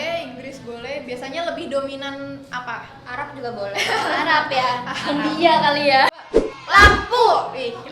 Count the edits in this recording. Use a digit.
1